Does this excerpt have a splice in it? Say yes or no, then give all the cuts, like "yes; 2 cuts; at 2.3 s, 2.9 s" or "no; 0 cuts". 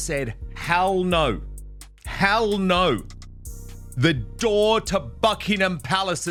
no; 0 cuts